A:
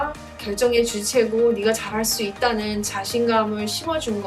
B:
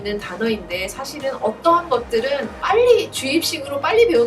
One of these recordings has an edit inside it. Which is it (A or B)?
B